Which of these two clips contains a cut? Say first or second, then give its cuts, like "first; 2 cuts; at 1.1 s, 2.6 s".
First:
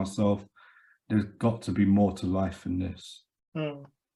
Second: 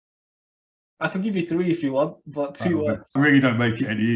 second; 1 cut; at 3.2 s